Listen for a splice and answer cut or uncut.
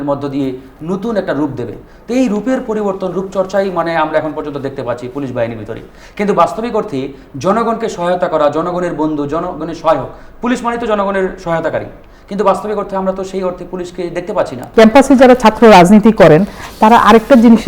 cut